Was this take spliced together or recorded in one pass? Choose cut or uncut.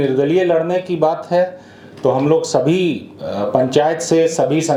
uncut